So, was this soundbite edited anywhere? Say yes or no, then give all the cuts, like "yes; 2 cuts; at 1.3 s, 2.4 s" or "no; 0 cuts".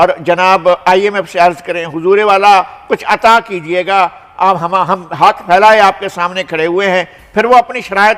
no; 0 cuts